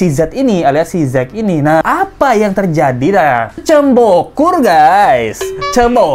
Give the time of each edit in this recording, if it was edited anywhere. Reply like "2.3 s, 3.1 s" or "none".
1.8 s, 3.6 s